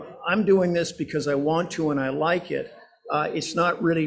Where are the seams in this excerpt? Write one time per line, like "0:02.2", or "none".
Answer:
none